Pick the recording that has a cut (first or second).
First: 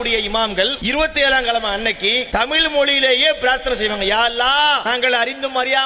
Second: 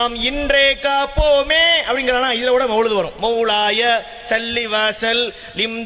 first